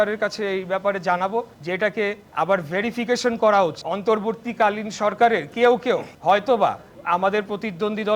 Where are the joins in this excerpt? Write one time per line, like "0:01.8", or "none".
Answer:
0:01.9
0:03.9
0:06.1
0:06.9